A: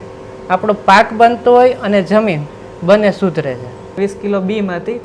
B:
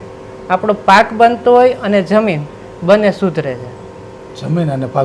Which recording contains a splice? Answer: A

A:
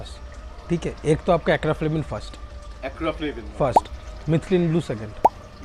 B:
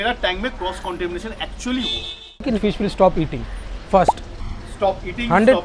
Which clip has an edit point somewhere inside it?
B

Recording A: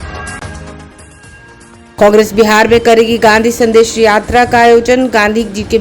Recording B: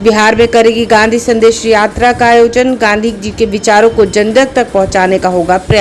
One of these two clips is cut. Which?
A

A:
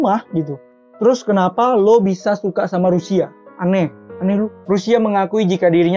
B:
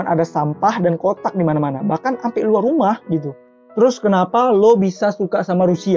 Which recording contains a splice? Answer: A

